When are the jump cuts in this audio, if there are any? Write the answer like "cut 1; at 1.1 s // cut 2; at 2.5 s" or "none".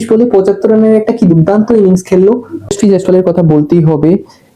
cut 1; at 2.7 s